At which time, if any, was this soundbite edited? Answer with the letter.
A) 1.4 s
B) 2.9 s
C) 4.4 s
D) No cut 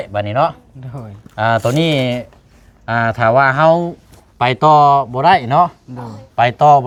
D